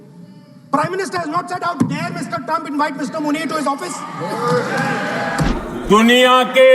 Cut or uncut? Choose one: cut